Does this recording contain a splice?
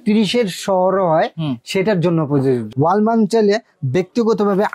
yes; 1 cut; at 2.7 s

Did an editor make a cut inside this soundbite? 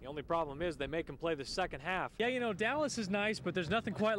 no; 0 cuts

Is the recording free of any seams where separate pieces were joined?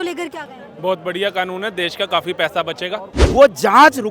no; 1 cut; at 3.1 s

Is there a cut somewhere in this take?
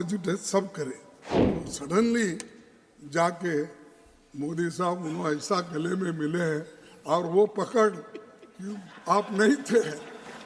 yes; 1 cut; at 1.4 s

